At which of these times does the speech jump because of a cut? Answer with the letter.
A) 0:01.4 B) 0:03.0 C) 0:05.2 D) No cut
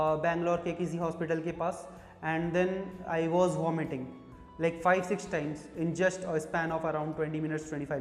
D